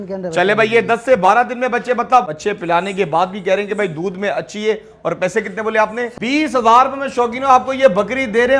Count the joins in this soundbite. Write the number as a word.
two